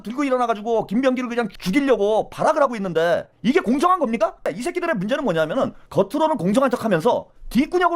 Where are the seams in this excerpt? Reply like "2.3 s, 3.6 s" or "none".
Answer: 4.4 s, 5.8 s